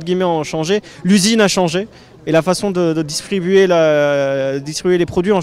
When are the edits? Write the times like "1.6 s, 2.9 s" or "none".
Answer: none